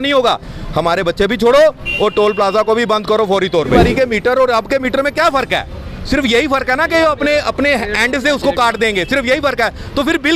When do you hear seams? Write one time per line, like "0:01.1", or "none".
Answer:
0:03.8